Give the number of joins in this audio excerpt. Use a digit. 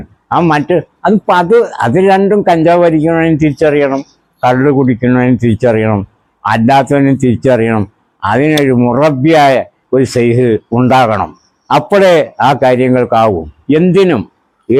0